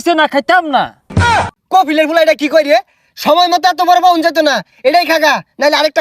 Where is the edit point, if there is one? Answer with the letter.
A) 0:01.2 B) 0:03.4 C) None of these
A